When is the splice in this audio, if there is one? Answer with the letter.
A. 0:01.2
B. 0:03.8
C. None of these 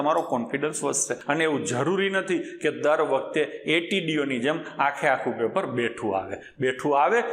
A